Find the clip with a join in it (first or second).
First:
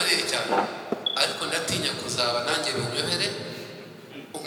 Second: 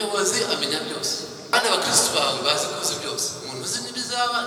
second